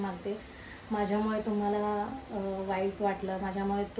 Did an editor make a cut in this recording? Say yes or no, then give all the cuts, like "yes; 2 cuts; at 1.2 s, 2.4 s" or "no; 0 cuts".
no; 0 cuts